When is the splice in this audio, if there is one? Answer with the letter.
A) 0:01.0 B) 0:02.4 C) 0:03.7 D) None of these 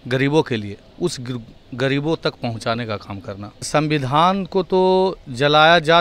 C